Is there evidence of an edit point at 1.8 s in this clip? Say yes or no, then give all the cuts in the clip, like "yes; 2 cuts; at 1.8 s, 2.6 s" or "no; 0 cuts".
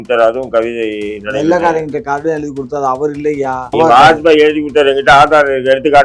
no; 1 cut; at 3.7 s